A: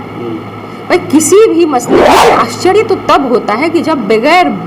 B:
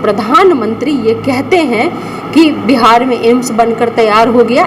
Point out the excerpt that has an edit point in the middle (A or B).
A